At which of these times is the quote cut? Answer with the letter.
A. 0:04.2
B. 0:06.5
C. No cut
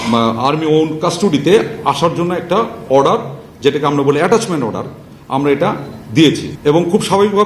B